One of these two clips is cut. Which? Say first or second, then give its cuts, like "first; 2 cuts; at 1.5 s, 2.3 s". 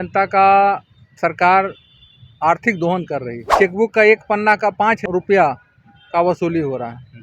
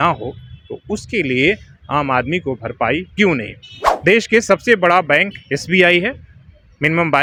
first; 2 cuts; at 3.4 s, 5.0 s